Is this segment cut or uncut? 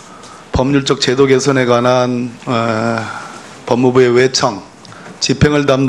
cut